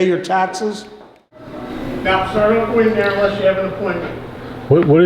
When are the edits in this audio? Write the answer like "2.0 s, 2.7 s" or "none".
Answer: 1.5 s